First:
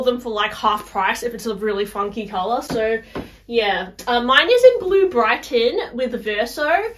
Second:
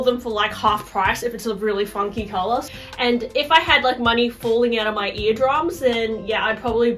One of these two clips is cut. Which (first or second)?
second